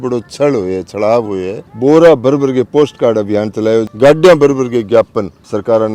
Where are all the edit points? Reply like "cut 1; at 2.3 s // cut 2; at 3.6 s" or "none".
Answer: cut 1; at 1.6 s // cut 2; at 3.9 s